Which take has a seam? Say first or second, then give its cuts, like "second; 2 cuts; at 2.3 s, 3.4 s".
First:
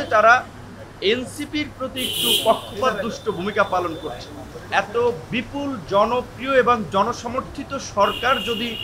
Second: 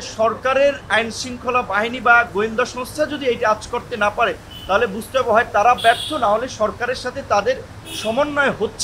first; 1 cut; at 4.5 s